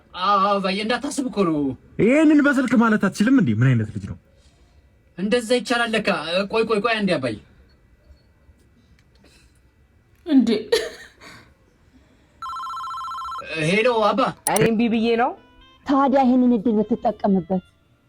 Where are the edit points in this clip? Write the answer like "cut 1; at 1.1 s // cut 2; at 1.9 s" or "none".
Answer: cut 1; at 14.4 s